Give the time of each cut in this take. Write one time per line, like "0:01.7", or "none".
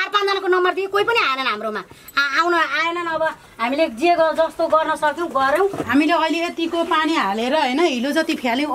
0:05.8